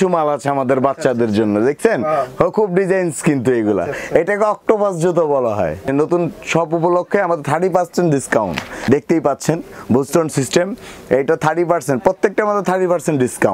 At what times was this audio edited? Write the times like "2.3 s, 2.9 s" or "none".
5.8 s, 8.8 s